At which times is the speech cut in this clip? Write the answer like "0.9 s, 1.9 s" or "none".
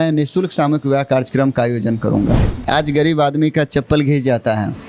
2.6 s

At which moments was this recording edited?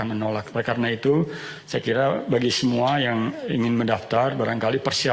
none

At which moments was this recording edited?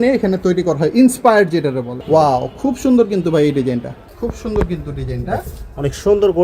1.9 s, 4.0 s

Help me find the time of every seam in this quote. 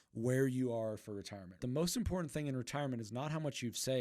1.5 s

